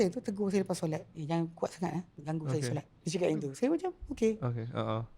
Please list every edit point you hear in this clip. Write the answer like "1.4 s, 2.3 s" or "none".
1.1 s, 2.1 s, 3.0 s